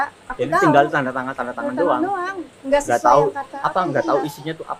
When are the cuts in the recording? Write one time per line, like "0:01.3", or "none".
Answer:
none